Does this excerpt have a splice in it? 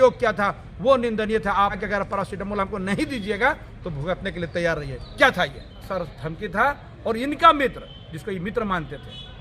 yes; 2 cuts; at 1.8 s, 5.9 s

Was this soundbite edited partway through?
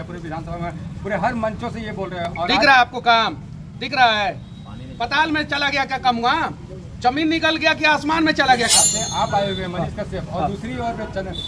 yes; 1 cut; at 8.7 s

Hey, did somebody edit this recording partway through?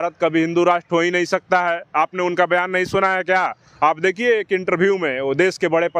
no; 0 cuts

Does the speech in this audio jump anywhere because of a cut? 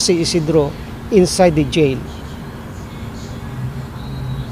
yes; 1 cut; at 3.1 s

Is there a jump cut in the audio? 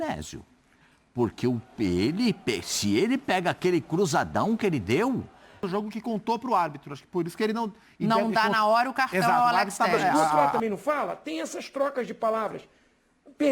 yes; 2 cuts; at 5.6 s, 10.5 s

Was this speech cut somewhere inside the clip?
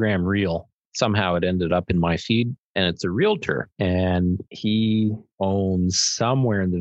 yes; 4 cuts; at 2.7 s, 3.7 s, 4.5 s, 5.2 s

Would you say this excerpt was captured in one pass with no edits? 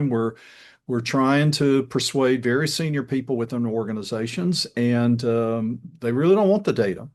yes; 0 cuts

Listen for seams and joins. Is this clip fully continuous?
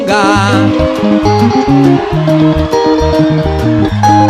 yes; 0 cuts

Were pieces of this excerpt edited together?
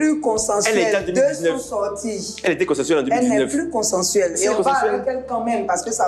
no; 0 cuts

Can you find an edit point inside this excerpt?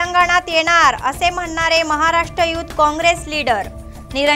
no; 0 cuts

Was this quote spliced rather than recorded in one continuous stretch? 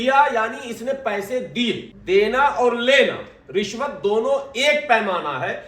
yes; 1 cut; at 1.9 s

